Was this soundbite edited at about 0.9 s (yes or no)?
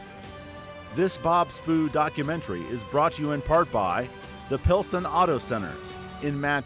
yes